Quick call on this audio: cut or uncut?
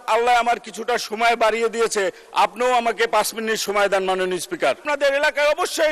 cut